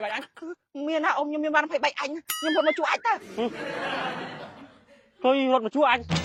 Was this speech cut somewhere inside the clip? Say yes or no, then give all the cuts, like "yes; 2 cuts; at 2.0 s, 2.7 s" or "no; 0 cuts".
no; 0 cuts